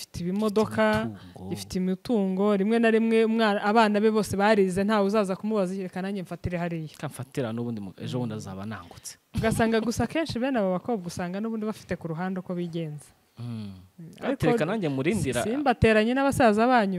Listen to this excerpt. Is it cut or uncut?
uncut